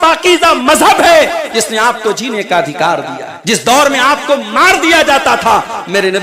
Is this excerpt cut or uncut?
cut